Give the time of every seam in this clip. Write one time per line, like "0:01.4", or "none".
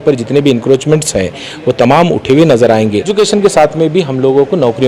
0:03.1